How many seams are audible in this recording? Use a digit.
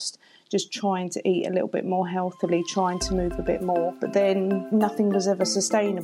2